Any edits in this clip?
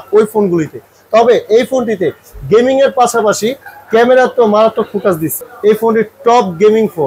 yes; 1 cut; at 5.5 s

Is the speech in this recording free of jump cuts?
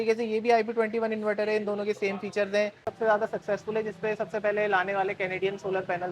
no; 1 cut; at 2.8 s

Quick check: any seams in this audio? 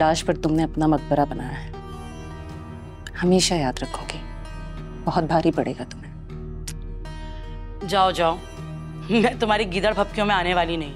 no; 0 cuts

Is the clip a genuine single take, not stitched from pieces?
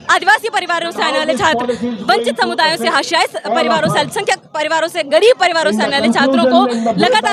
yes; 0 cuts

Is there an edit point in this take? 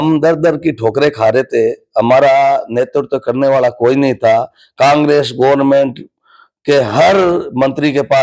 no; 0 cuts

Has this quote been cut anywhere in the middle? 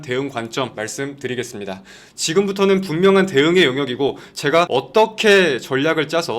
yes; 1 cut; at 2.0 s

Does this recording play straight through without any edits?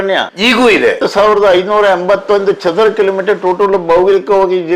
no; 1 cut; at 1.0 s

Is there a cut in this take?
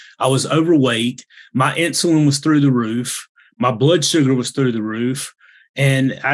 no; 0 cuts

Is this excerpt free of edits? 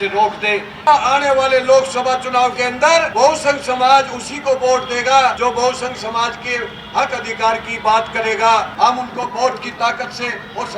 no; 4 cuts; at 0.8 s, 3.1 s, 5.4 s, 8.7 s

